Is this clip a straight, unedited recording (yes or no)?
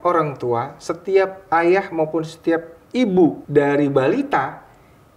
no